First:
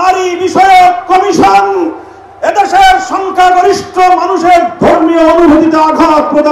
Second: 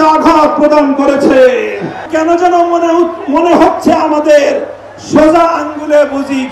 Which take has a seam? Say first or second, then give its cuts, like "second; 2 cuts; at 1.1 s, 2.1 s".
second; 1 cut; at 2.0 s